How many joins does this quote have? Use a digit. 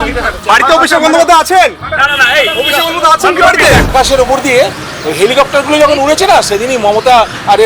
1